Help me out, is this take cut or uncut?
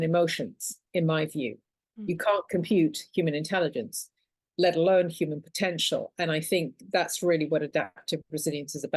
uncut